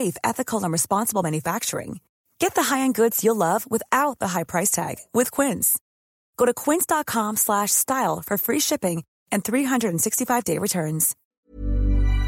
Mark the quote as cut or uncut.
cut